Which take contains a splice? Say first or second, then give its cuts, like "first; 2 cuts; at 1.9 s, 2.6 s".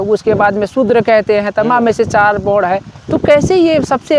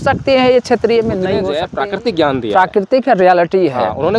second; 1 cut; at 1.6 s